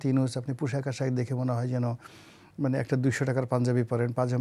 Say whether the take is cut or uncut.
uncut